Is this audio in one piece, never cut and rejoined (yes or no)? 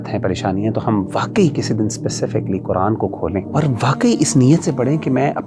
no